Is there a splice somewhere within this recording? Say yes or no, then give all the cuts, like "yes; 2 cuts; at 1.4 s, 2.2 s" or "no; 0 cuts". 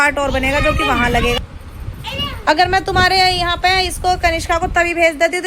yes; 1 cut; at 1.4 s